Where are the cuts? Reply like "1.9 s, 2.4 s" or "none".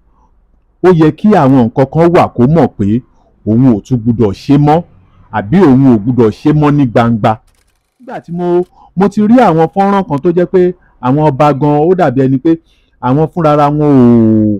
8.3 s